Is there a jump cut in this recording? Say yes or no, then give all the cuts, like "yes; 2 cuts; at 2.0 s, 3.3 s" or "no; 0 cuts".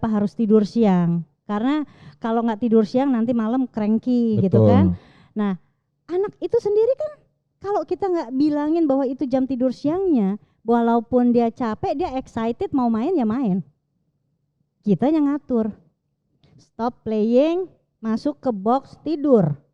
no; 0 cuts